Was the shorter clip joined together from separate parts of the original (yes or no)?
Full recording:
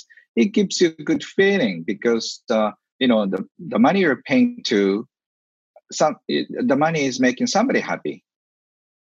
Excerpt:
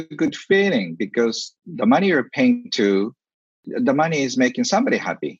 yes